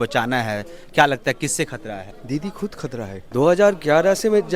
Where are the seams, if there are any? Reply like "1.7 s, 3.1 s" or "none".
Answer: 2.1 s, 3.2 s